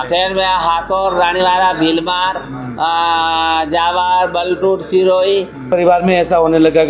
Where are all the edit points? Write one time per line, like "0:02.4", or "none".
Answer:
0:05.7

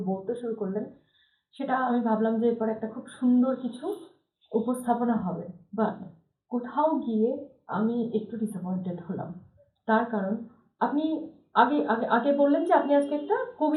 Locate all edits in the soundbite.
none

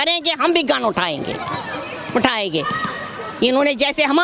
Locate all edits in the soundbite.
none

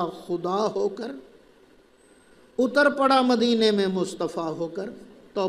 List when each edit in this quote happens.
none

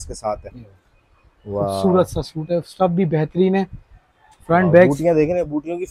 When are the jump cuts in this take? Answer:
none

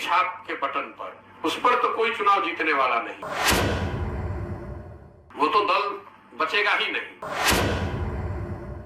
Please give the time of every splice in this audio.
0:03.1

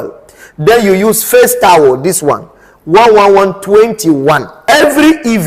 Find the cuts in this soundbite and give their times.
0:04.5

